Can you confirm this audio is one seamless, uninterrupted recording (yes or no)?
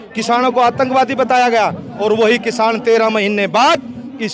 no